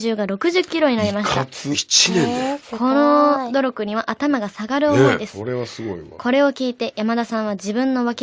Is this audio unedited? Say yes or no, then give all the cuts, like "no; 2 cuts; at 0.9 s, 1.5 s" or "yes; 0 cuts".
yes; 0 cuts